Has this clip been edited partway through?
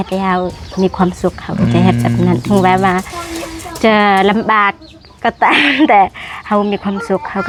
no; 0 cuts

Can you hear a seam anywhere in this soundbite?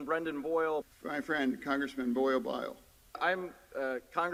no; 0 cuts

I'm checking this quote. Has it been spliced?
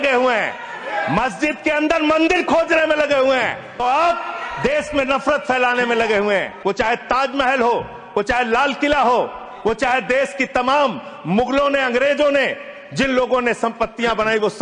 yes; 2 cuts; at 3.8 s, 6.5 s

